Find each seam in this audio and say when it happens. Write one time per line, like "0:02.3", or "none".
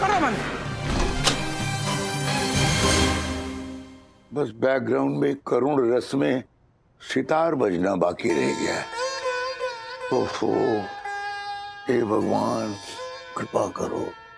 none